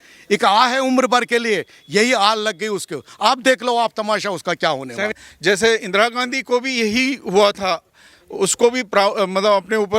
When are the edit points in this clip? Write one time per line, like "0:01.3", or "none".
0:05.1

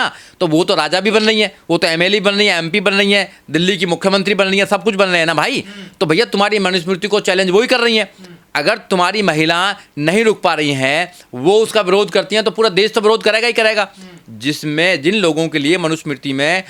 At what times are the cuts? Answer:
none

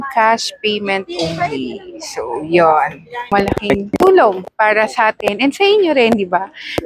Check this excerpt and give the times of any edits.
0:03.3

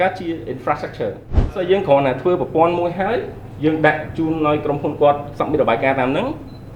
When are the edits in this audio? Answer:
0:01.5

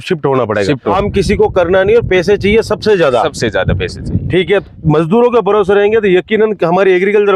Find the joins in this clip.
0:00.9
0:04.6

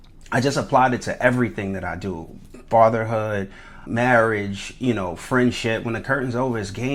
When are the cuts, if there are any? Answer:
0:03.8

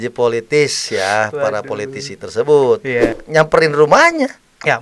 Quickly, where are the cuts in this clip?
0:03.2

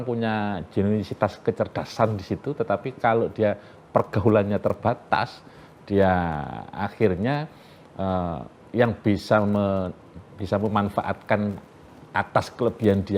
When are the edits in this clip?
none

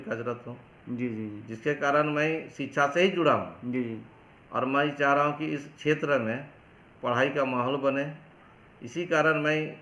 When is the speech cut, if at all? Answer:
none

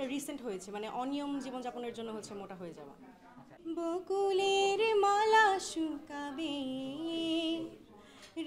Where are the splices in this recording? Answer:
0:03.5

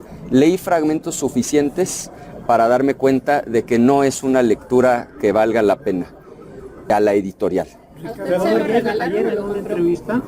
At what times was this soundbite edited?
0:06.9

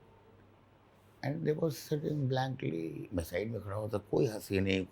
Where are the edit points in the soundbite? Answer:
none

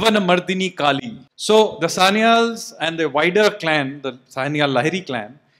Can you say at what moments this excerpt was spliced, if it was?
0:01.3

